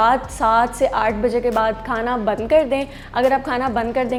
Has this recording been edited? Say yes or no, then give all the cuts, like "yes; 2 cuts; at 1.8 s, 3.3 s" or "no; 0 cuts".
no; 0 cuts